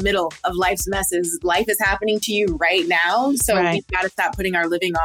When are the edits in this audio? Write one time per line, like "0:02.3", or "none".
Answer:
none